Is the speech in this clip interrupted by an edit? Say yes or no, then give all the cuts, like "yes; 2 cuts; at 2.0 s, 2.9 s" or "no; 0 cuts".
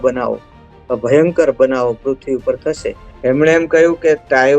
yes; 1 cut; at 3.1 s